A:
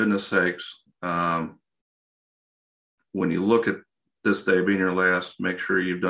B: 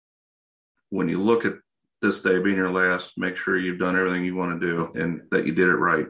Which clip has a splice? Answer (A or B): B